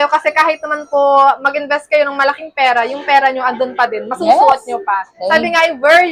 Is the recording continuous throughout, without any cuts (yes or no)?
yes